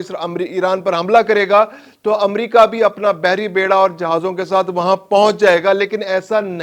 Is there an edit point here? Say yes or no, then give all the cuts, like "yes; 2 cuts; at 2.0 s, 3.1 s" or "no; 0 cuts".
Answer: no; 0 cuts